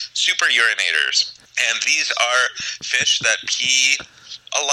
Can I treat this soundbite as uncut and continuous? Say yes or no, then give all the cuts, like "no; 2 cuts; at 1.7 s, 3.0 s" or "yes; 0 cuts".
yes; 0 cuts